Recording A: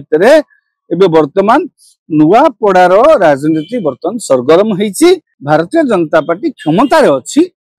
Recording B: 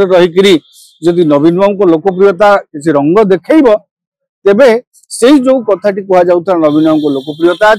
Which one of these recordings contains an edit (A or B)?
A